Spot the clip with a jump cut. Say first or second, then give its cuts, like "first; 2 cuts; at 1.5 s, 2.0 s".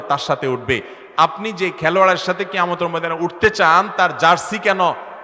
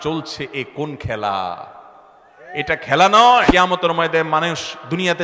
second; 1 cut; at 3.5 s